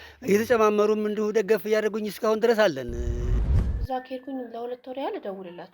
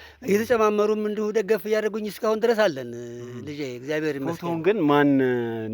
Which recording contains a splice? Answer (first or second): first